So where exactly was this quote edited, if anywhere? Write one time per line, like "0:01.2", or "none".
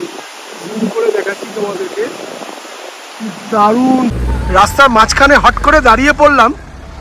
0:04.2